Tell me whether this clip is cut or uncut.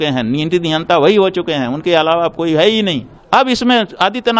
cut